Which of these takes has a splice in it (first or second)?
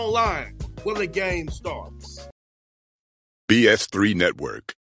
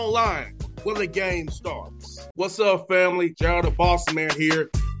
first